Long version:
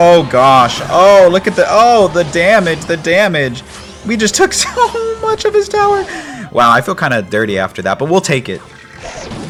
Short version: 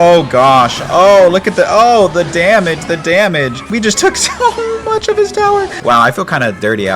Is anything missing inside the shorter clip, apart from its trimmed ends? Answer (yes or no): yes